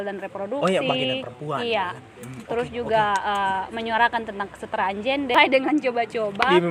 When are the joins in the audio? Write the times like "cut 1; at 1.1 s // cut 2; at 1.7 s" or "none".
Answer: cut 1; at 5.3 s

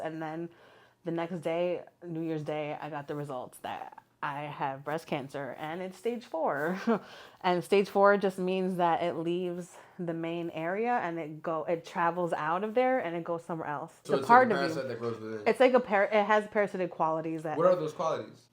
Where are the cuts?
cut 1; at 14.0 s

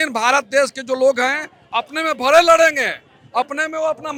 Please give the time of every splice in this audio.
none

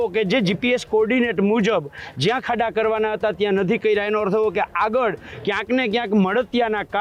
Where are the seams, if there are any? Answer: none

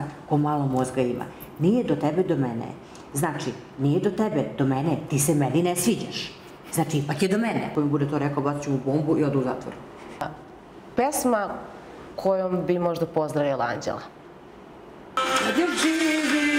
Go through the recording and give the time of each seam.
cut 1; at 7.7 s // cut 2; at 10.2 s // cut 3; at 15.2 s

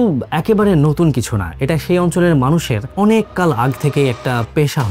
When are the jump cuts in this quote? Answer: none

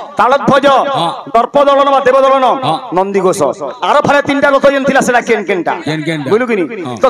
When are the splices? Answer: none

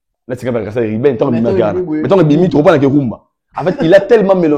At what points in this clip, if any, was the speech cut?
none

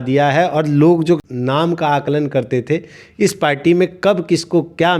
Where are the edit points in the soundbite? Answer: cut 1; at 1.3 s

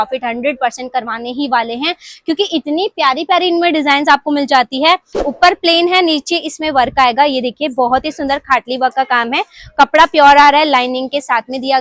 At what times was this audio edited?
cut 1; at 5.2 s

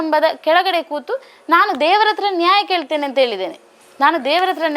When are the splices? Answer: none

